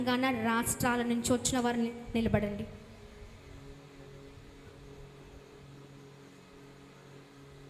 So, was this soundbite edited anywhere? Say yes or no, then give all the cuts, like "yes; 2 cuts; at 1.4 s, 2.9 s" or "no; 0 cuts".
no; 0 cuts